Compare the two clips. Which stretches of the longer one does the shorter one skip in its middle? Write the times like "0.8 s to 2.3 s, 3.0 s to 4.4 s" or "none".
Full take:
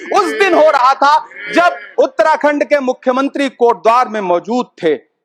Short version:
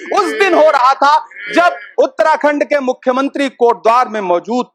none